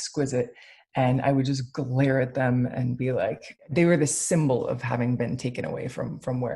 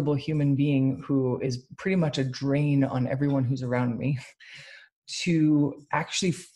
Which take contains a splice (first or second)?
first